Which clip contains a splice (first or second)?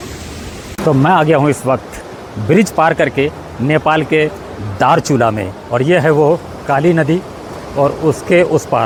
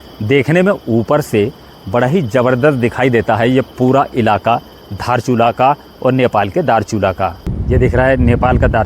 second